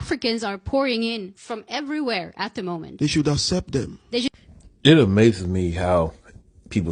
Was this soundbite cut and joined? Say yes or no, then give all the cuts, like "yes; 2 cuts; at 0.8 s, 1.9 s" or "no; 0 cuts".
no; 0 cuts